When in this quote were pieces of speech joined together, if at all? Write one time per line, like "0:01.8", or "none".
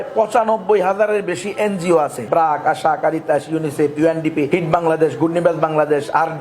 0:02.2
0:04.5